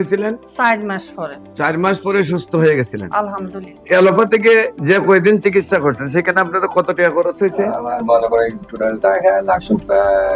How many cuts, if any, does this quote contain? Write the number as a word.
one